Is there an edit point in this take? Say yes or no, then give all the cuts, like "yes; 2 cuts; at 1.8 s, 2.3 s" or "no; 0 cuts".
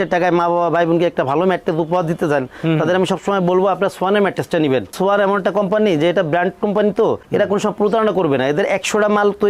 no; 0 cuts